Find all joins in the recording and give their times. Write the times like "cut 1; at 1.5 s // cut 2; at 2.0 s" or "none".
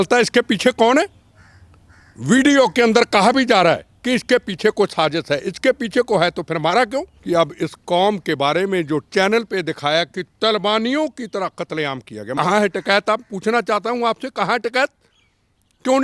cut 1; at 7.1 s // cut 2; at 12.3 s